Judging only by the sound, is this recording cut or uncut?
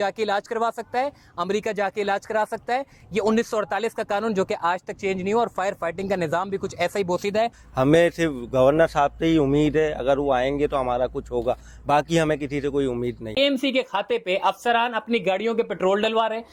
cut